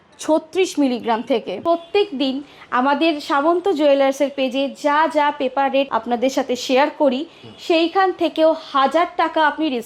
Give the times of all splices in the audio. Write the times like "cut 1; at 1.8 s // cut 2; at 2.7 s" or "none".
cut 1; at 1.6 s